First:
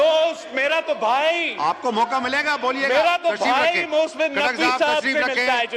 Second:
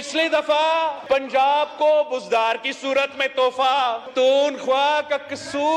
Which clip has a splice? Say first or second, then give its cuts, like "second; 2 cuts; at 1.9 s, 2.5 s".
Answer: second; 2 cuts; at 1.0 s, 4.1 s